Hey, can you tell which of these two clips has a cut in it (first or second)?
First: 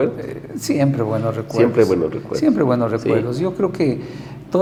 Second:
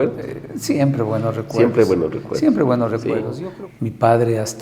second